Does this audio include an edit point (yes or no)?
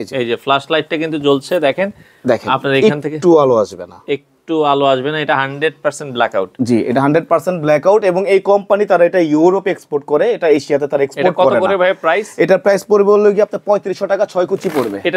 no